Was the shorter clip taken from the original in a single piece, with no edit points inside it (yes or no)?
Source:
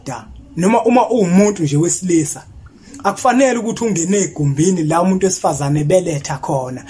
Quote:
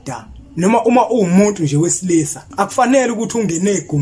no